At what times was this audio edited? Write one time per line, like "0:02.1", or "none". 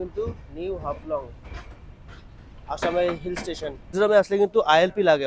0:03.8